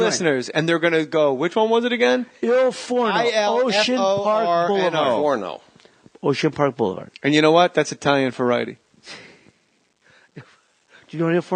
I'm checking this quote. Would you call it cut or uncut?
cut